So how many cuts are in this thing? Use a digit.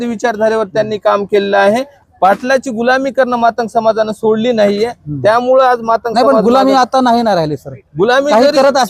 1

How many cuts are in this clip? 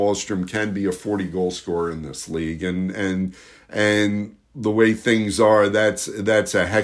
0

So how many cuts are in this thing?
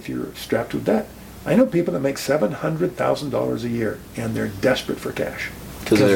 0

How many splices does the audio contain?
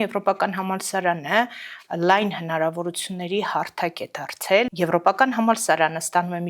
1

